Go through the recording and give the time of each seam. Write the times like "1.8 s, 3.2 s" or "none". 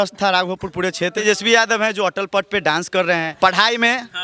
1.2 s, 3.3 s